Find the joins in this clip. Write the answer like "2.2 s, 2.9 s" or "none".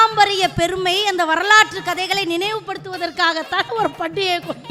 none